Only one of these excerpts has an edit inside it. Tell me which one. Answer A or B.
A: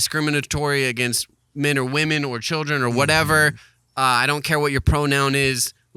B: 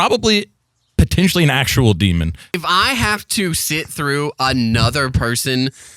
B